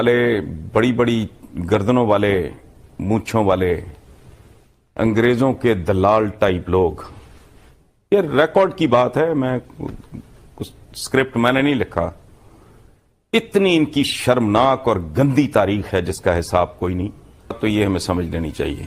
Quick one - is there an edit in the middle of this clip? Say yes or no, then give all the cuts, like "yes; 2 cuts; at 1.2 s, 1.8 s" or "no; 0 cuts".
yes; 1 cut; at 17.6 s